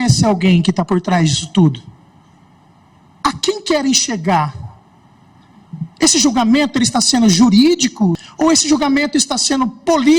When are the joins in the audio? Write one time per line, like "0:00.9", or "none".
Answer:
0:08.2